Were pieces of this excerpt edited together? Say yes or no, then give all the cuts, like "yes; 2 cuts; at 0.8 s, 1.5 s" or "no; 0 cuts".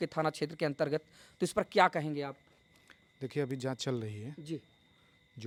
no; 0 cuts